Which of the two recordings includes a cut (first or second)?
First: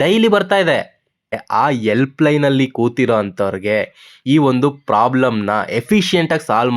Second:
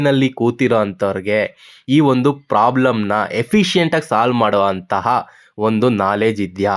first